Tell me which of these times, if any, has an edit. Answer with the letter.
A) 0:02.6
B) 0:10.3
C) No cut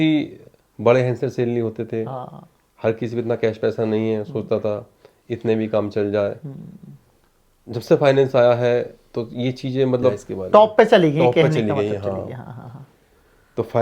B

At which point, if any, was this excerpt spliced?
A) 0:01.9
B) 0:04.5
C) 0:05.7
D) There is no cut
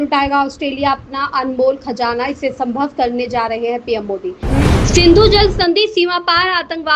B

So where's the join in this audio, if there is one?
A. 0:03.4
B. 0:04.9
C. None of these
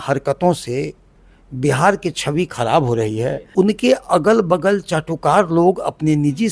A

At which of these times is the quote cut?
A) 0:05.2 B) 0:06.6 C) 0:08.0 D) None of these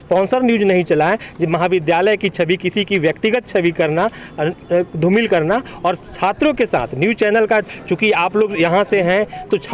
D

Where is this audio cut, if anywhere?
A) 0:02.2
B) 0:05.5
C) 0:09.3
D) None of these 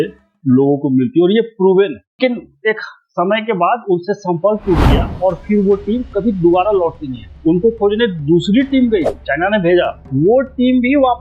A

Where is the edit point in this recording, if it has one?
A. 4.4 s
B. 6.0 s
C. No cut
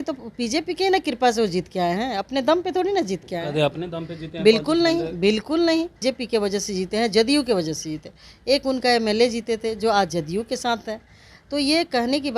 B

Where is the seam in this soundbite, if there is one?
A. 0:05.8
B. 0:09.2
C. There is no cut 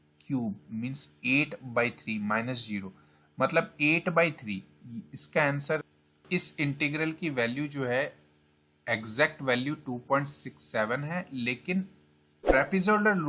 A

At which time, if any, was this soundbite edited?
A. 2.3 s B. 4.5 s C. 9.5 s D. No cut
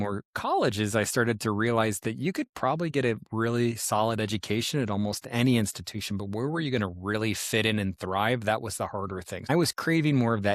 C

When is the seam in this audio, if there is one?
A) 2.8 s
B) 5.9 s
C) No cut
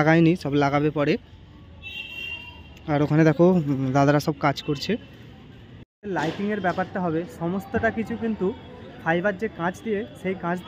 B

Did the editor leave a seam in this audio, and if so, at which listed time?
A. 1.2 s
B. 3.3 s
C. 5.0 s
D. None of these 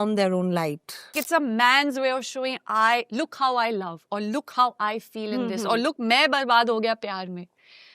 A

